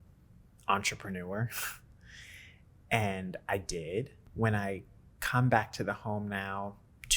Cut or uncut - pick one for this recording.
cut